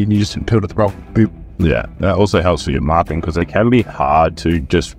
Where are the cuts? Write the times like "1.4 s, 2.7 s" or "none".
1.9 s, 3.5 s